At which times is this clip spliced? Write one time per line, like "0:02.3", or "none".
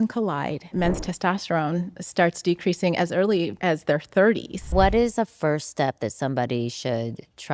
0:00.7
0:03.6
0:04.7